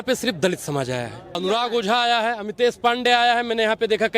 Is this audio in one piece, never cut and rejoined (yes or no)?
no